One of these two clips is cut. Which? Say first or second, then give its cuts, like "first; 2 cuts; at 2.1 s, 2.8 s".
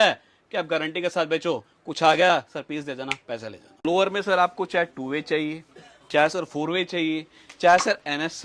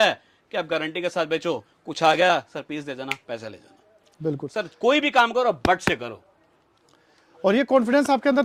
first; 1 cut; at 3.8 s